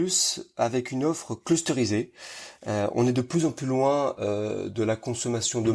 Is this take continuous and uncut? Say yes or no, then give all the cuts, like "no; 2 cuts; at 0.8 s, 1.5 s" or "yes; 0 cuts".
yes; 0 cuts